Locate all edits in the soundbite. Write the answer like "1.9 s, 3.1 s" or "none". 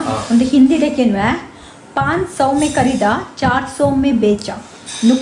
none